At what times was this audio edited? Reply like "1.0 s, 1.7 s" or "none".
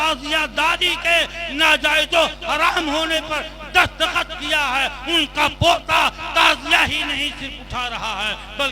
none